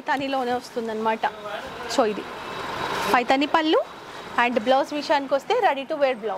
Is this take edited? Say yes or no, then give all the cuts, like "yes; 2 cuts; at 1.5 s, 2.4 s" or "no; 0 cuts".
no; 0 cuts